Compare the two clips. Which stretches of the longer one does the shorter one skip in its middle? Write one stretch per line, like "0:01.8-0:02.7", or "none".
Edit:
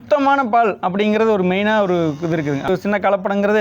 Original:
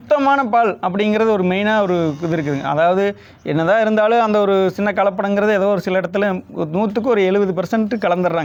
0:02.7-0:04.6